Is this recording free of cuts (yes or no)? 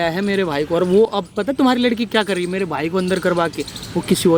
yes